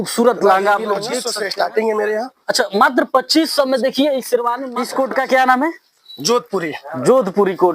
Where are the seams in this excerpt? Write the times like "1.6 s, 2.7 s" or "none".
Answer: 1.2 s, 4.7 s